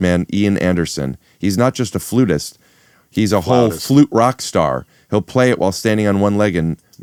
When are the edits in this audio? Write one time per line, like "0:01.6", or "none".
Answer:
none